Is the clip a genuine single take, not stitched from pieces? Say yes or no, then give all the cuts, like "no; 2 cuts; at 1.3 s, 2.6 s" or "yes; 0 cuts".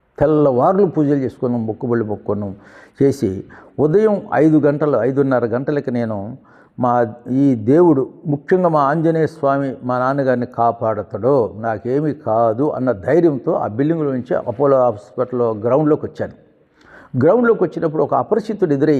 yes; 0 cuts